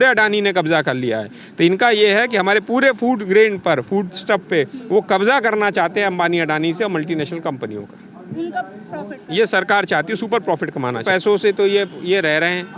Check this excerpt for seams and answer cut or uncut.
cut